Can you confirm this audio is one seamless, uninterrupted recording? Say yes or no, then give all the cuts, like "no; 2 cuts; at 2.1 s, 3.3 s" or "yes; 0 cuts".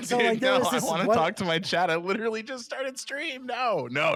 yes; 0 cuts